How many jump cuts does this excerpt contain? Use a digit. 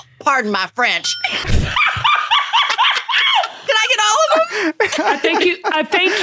1